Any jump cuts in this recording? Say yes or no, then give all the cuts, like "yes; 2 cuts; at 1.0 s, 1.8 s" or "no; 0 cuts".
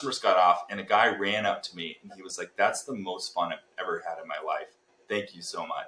no; 0 cuts